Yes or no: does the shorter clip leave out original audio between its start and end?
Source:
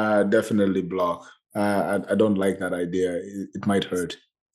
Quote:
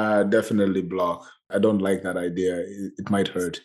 yes